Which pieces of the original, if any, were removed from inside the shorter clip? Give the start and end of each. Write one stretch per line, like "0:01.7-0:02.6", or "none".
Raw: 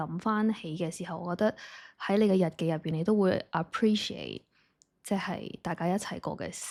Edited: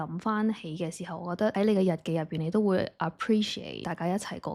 0:01.5-0:02.1
0:04.3-0:05.6